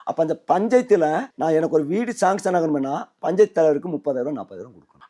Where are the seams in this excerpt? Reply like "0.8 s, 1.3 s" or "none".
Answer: 1.3 s

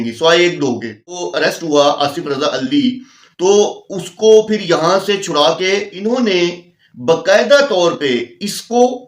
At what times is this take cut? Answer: 1.2 s, 5.9 s

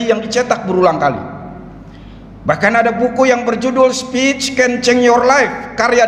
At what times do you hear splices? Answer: none

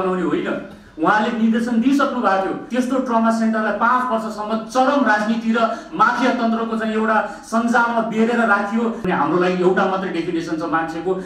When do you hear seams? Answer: 2.6 s, 9.1 s

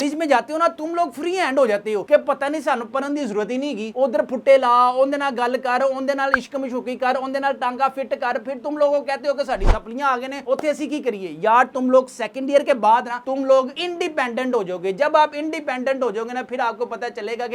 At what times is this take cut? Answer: none

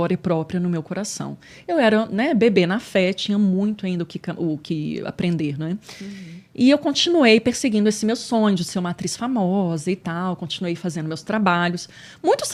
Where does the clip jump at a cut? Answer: none

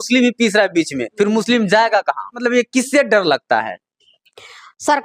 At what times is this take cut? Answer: 2.4 s

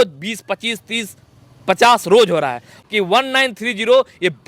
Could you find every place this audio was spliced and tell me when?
2.8 s

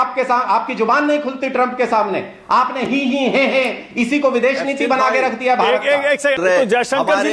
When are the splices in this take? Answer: 2.9 s, 6.4 s

